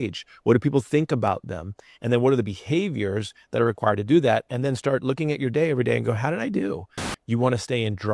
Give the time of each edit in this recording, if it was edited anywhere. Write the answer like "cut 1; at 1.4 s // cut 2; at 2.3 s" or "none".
cut 1; at 7.0 s